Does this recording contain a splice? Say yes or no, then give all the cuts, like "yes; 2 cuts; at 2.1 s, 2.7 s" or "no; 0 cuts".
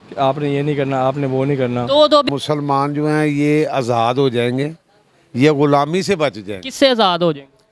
yes; 1 cut; at 2.3 s